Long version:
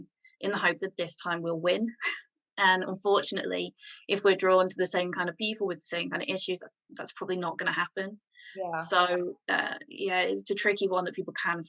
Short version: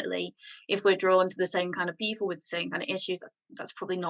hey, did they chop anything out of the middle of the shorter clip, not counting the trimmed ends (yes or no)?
no